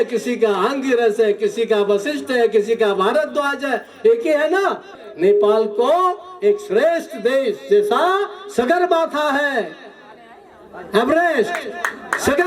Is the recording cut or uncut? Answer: cut